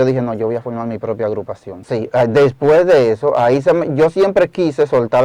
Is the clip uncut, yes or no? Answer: no